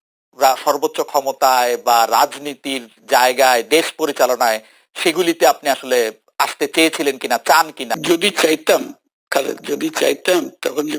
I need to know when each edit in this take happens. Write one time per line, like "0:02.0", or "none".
0:07.9